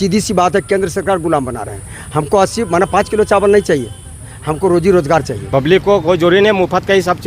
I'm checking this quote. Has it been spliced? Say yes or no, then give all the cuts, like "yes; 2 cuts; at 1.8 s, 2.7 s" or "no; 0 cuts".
yes; 1 cut; at 5.4 s